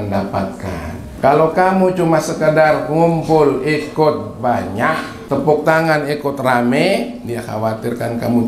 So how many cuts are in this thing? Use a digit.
2